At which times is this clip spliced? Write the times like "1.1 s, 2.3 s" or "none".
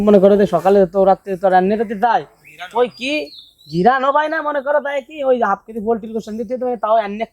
none